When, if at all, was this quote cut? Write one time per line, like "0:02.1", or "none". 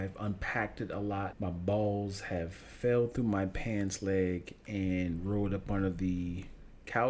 0:01.3